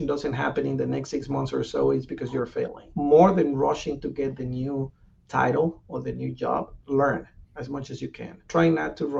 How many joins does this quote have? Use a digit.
0